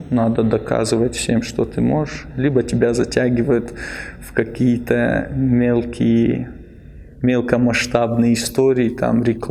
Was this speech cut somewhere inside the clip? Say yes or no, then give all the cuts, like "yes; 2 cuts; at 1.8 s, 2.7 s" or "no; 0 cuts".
no; 0 cuts